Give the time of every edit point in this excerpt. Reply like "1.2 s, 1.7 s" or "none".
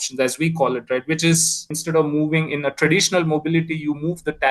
1.7 s